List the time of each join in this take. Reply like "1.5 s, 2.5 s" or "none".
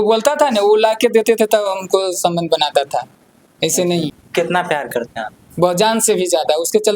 4.2 s